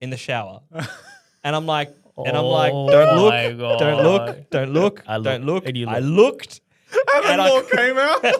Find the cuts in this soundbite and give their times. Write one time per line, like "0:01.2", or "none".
none